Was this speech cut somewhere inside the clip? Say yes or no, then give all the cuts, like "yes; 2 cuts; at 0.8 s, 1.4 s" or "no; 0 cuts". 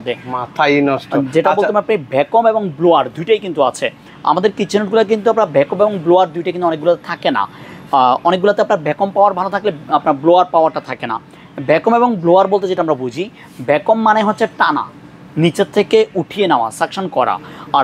no; 0 cuts